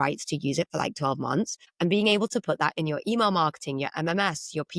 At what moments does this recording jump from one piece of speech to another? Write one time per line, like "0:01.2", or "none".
0:01.6